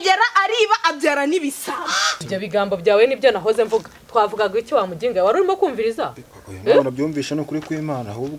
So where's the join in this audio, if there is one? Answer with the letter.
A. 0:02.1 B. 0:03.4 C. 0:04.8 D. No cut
A